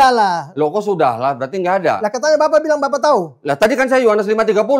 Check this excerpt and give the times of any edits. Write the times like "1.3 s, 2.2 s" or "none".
none